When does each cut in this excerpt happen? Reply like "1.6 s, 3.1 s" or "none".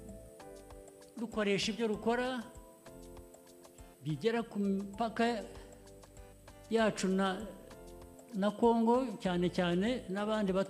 none